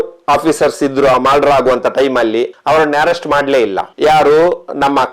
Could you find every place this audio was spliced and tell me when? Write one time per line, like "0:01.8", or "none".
0:02.5
0:03.9